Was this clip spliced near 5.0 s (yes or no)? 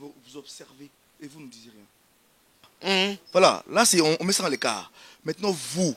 no